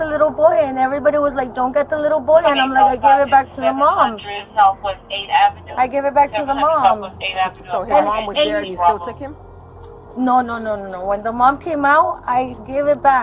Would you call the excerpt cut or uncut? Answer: uncut